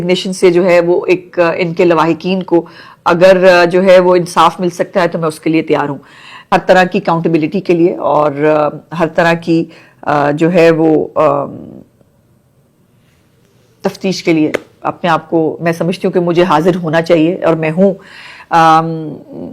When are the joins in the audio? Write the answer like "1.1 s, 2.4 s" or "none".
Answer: 6.4 s